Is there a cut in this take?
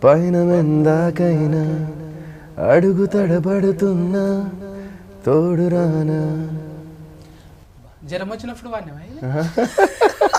no; 0 cuts

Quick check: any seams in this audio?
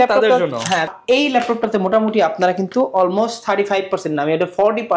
yes; 1 cut; at 0.9 s

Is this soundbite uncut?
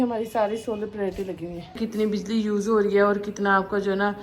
no; 1 cut; at 1.8 s

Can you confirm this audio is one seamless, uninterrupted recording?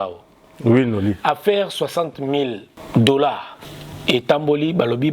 no; 1 cut; at 2.7 s

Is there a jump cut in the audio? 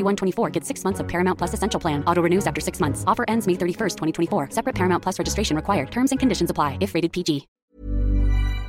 yes; 1 cut; at 7.5 s

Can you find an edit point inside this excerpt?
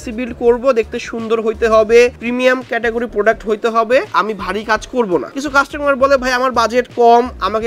yes; 2 cuts; at 4.1 s, 5.3 s

